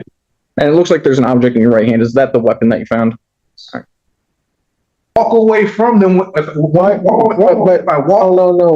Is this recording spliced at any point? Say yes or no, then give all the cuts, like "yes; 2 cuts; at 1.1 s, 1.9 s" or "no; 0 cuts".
yes; 1 cut; at 5.2 s